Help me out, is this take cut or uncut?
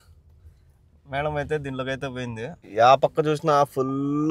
cut